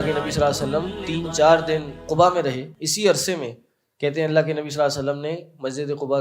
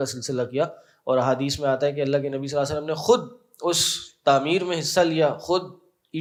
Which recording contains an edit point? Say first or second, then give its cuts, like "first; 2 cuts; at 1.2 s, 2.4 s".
first; 3 cuts; at 1.0 s, 2.0 s, 2.7 s